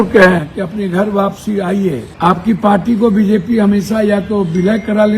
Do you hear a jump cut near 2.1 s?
yes; 1 cut; at 2.1 s

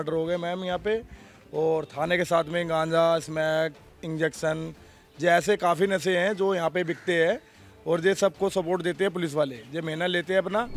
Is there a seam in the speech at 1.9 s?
no; 0 cuts

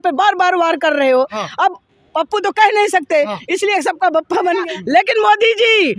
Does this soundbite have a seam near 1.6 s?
no; 1 cut; at 4.6 s

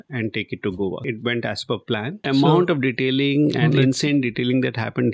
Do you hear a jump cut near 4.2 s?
no; 2 cuts; at 1.0 s, 2.2 s

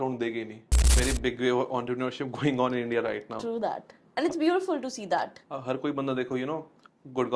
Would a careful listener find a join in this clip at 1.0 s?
yes; 1 cut; at 1.0 s

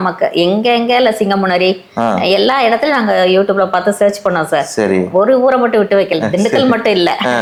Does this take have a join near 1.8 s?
no; 0 cuts

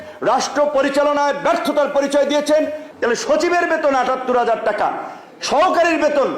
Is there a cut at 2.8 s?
yes; 1 cut; at 2.8 s

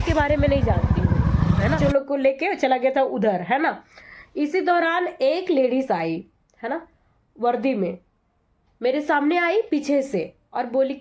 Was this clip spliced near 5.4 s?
no; 1 cut; at 1.8 s

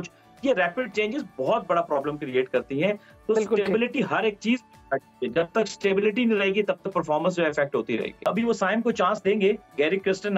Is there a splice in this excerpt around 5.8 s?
no; 1 cut; at 8.3 s

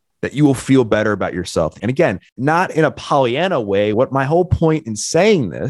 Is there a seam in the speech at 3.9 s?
yes; 2 cuts; at 1.8 s, 3.9 s

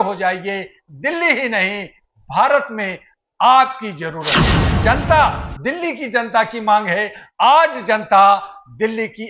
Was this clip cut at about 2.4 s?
no; 1 cut; at 4.6 s

